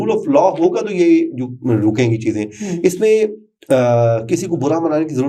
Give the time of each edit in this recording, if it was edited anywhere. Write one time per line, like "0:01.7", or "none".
none